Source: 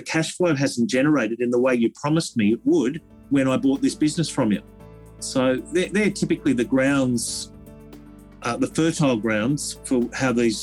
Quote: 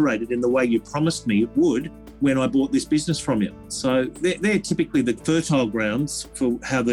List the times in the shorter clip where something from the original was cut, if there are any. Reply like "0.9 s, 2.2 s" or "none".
3.6 s, 5.2 s